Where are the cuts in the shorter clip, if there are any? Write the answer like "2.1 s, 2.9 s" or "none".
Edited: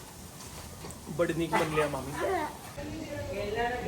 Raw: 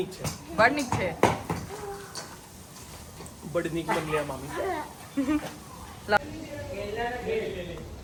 2.8 s